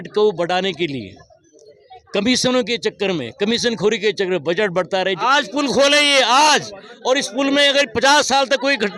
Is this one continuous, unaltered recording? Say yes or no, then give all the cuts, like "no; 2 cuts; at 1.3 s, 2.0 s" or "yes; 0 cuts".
no; 1 cut; at 5.2 s